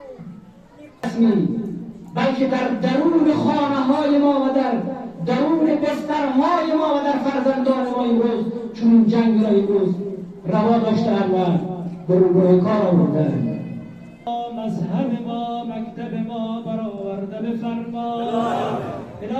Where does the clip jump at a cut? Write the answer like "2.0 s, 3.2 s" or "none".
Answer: 1.1 s, 14.3 s